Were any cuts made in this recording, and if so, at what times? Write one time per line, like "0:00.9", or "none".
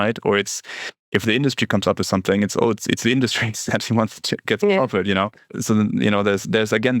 0:04.4
0:05.4